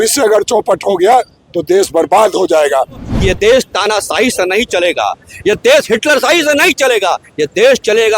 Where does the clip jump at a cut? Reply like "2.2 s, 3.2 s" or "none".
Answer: 3.1 s

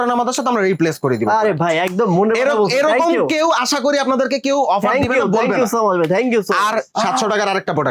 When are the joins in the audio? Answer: 6.9 s

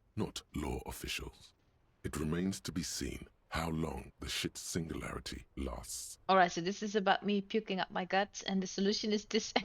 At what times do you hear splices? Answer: none

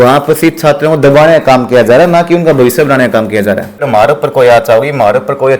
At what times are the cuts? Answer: 3.9 s

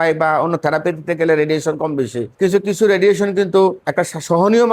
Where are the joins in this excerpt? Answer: 2.2 s, 3.8 s

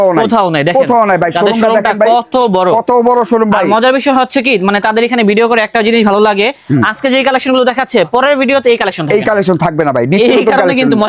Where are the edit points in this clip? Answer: none

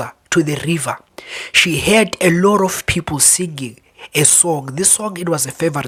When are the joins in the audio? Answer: none

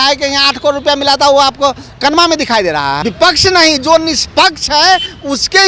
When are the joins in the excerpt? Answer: 3.0 s

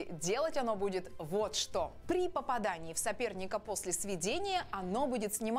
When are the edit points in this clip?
none

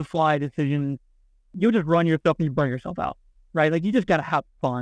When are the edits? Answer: 1.4 s

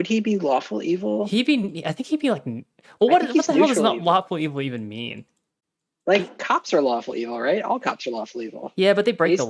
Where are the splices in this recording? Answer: none

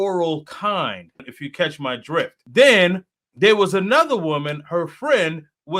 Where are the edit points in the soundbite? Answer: 1.3 s, 2.4 s

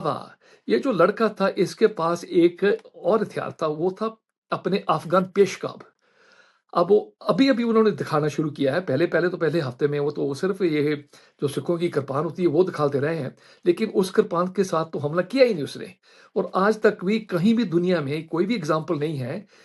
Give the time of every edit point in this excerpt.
none

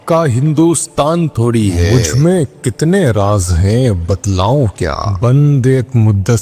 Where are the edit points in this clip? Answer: 1.8 s, 5.1 s

